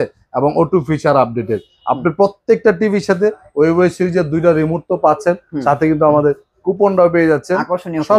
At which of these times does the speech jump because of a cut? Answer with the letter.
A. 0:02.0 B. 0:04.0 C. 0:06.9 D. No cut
D